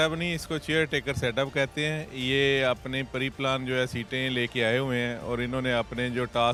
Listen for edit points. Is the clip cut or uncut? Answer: uncut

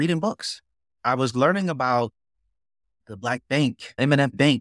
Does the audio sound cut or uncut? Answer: cut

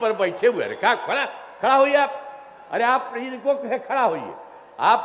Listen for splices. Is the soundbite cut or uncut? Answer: uncut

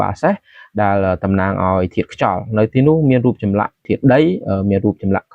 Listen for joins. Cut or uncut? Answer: cut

